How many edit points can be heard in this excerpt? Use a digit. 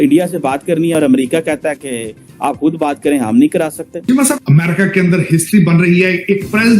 2